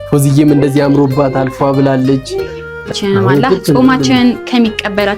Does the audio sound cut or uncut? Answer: cut